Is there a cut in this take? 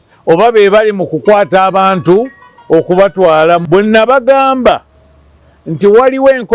yes; 1 cut; at 3.6 s

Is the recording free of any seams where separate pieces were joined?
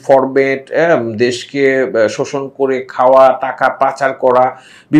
yes; 0 cuts

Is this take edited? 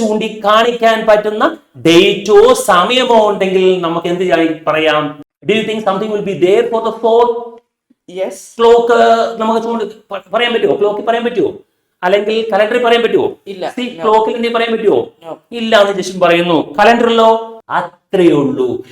yes; 2 cuts; at 5.2 s, 17.6 s

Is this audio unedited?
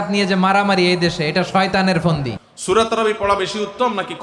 no; 1 cut; at 2.5 s

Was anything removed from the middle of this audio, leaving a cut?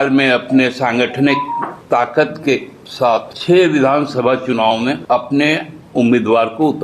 yes; 3 cuts; at 1.8 s, 3.3 s, 5.0 s

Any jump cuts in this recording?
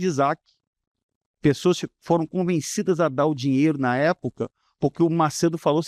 no; 0 cuts

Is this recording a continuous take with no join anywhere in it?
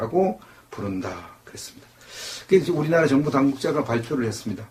no; 1 cut; at 3.4 s

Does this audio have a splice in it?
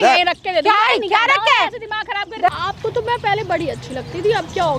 yes; 1 cut; at 2.5 s

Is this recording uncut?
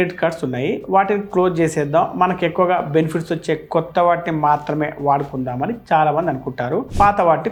yes; 0 cuts

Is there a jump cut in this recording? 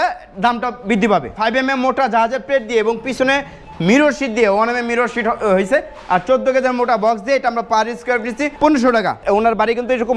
yes; 3 cuts; at 1.3 s, 8.5 s, 9.2 s

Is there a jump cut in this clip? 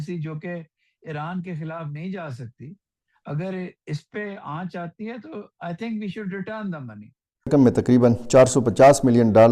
yes; 1 cut; at 7.5 s

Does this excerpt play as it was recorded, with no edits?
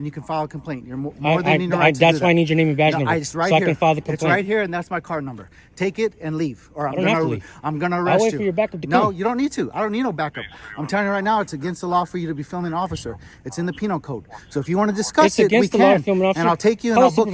yes; 0 cuts

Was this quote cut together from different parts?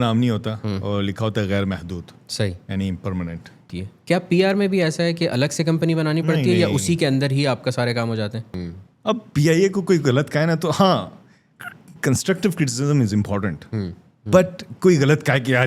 yes; 2 cuts; at 3.6 s, 8.4 s

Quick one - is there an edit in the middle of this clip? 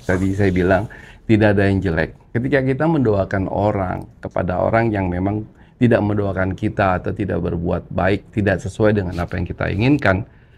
yes; 1 cut; at 2.2 s

